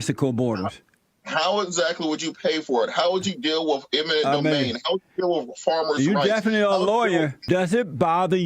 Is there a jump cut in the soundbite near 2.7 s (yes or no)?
no